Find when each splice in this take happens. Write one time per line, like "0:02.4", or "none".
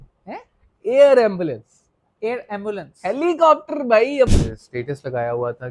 0:04.3